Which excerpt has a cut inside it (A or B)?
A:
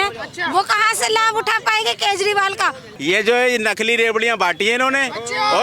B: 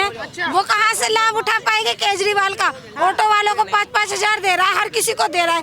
A